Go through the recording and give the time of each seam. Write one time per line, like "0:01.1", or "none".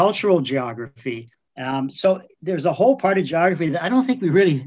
none

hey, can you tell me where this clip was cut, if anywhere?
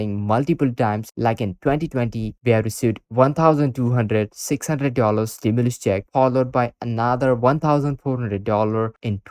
none

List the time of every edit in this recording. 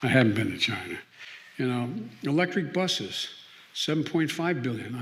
none

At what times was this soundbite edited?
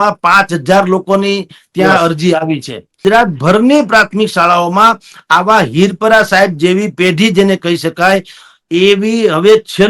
0:03.0

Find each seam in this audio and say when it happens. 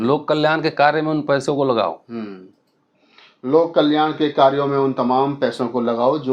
none

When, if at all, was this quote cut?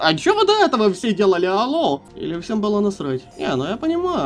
0:02.1
0:03.3

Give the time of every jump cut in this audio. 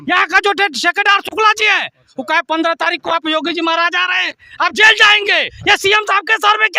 0:05.5

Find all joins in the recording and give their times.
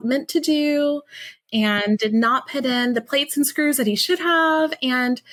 none

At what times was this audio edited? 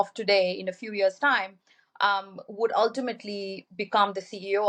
none

